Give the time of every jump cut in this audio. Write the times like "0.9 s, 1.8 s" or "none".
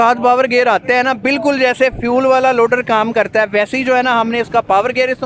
none